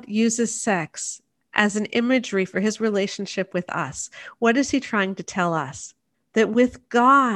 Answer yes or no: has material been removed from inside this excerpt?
no